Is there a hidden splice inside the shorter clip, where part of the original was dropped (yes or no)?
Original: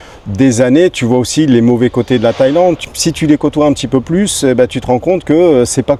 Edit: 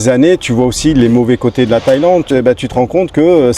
yes